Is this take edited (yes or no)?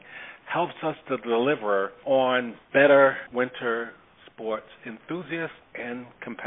yes